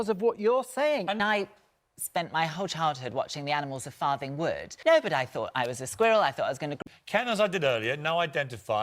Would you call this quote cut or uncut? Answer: cut